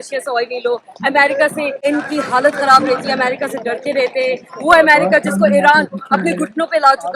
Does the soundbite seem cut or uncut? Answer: cut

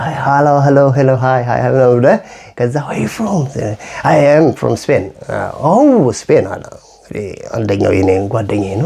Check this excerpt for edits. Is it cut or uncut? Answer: uncut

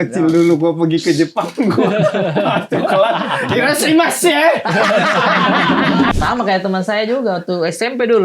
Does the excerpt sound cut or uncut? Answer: cut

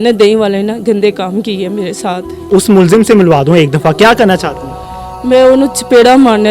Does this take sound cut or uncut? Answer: cut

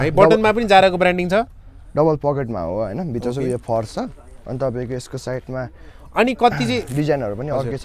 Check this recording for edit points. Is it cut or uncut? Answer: uncut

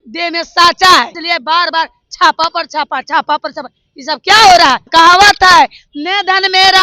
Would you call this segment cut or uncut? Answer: cut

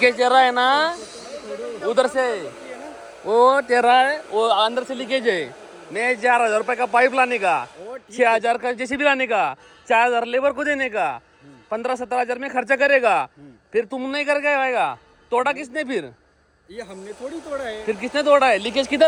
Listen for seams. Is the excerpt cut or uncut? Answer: uncut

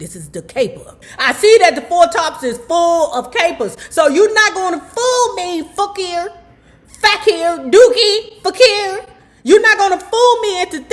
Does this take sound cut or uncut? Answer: cut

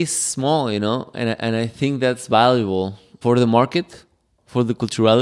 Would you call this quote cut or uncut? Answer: uncut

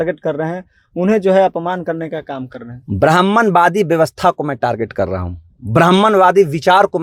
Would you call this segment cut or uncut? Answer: uncut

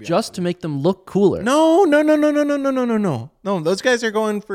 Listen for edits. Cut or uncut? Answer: uncut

